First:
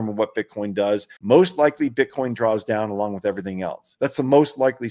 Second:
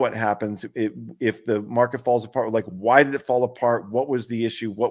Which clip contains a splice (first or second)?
first